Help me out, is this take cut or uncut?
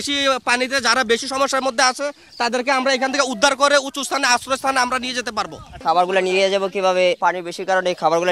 cut